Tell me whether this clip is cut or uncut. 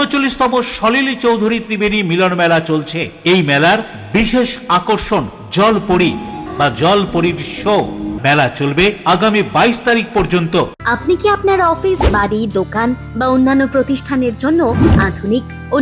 cut